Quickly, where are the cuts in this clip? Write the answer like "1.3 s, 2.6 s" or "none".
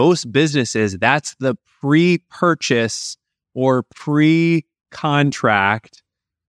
none